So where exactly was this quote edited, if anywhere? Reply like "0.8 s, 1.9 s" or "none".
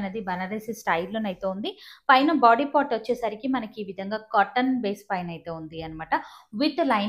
none